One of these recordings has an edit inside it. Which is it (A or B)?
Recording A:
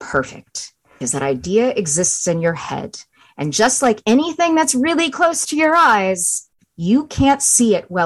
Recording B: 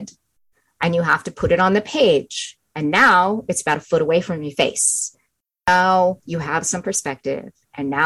A